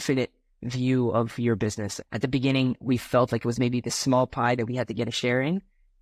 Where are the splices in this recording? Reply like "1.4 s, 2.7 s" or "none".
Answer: 1.9 s